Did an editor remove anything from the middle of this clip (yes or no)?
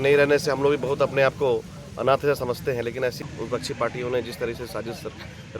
yes